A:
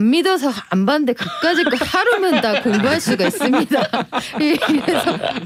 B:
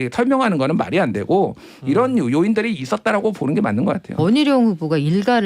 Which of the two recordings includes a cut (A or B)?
B